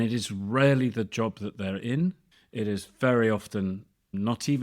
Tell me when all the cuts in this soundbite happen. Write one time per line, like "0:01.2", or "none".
none